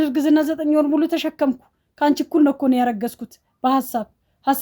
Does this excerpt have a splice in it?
no; 0 cuts

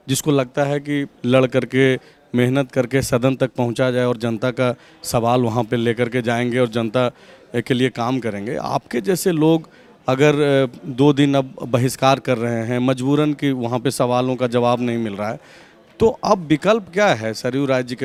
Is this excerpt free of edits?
yes; 0 cuts

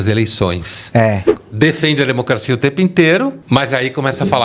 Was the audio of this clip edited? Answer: yes; 2 cuts; at 1.3 s, 3.4 s

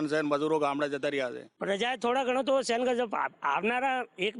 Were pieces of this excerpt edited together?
yes; 1 cut; at 1.5 s

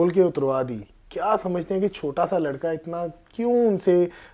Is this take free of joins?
yes; 0 cuts

